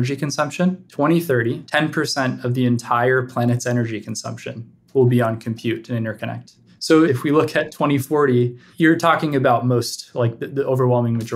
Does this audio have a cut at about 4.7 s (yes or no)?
no